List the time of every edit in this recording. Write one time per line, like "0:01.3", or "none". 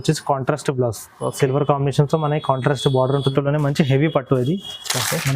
0:03.3